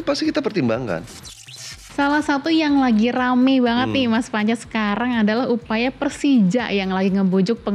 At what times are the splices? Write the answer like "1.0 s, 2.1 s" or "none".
1.8 s